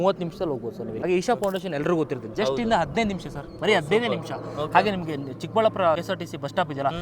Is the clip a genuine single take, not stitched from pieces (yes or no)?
no